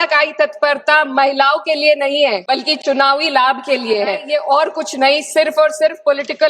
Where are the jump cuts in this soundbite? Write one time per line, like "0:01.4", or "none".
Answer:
0:02.4
0:04.2